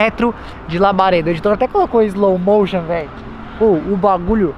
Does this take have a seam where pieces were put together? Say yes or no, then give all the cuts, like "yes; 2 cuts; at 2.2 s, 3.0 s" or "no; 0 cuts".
no; 0 cuts